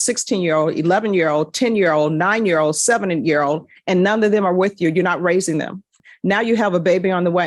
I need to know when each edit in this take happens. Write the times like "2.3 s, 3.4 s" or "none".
5.9 s

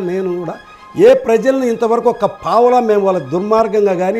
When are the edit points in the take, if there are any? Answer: none

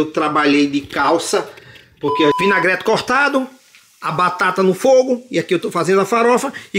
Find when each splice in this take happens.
2.3 s

